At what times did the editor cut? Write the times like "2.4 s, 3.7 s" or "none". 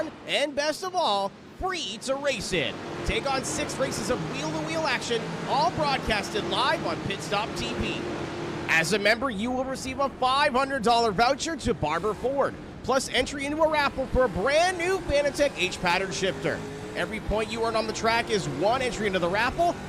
18.8 s